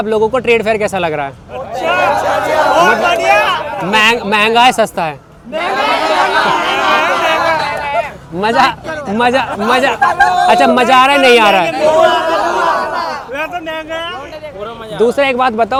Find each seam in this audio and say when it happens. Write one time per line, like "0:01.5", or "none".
none